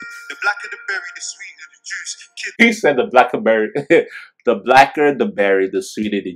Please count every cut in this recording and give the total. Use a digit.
1